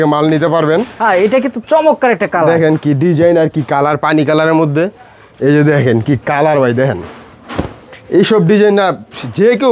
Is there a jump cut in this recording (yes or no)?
no